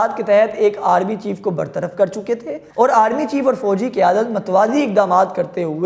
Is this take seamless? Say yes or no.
yes